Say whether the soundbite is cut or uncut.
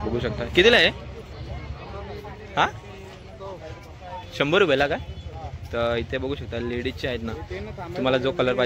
uncut